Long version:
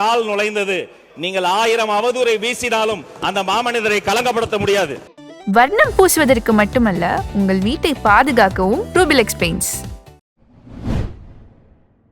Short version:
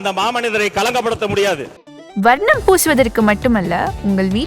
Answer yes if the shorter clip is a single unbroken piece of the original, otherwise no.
yes